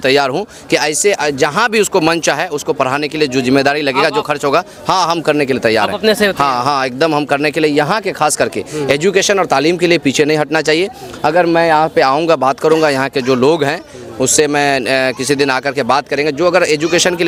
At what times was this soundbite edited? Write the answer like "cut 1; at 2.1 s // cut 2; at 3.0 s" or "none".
none